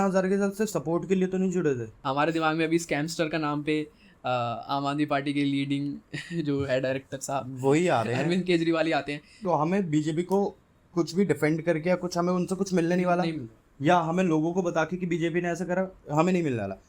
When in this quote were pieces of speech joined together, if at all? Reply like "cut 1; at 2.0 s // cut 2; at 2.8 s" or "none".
cut 1; at 1.9 s // cut 2; at 9.5 s